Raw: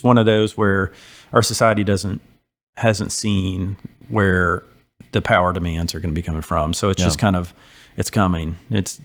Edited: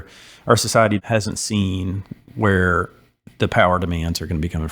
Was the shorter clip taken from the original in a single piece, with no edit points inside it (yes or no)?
no